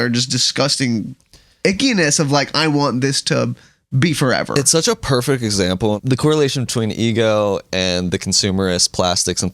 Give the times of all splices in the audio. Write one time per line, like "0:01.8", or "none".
0:06.0